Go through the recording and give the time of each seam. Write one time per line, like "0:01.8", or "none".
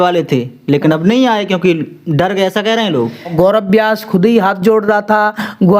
0:03.3